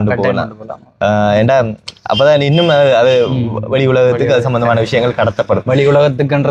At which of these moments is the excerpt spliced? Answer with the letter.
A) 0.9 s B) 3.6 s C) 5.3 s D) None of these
D